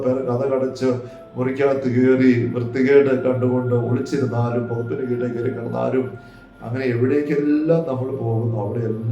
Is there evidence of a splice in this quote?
no; 0 cuts

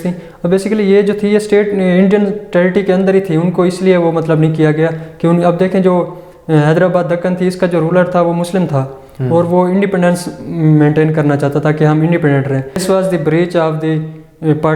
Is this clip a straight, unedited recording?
no; 1 cut; at 12.8 s

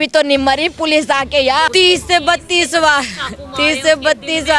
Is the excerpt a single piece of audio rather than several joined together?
no; 1 cut; at 1.7 s

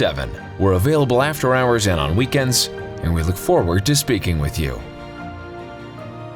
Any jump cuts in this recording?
no; 0 cuts

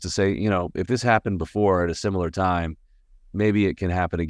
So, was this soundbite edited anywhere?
no; 0 cuts

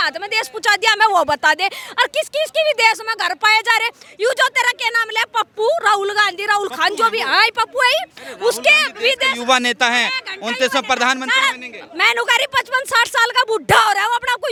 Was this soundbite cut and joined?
no; 0 cuts

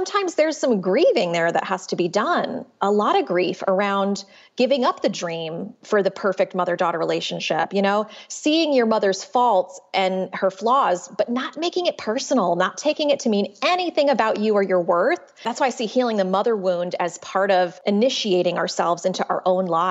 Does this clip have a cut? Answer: yes; 2 cuts; at 15.3 s, 17.8 s

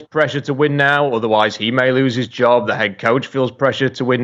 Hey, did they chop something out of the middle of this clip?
no; 0 cuts

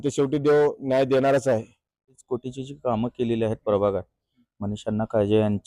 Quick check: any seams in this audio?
yes; 1 cut; at 2.2 s

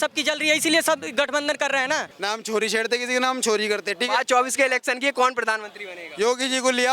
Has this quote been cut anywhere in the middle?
yes; 1 cut; at 2.1 s

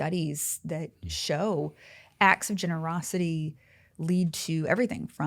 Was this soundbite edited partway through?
no; 0 cuts

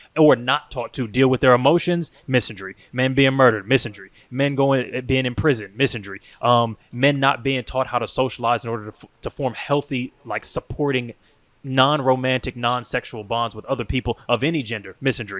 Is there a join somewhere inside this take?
no; 0 cuts

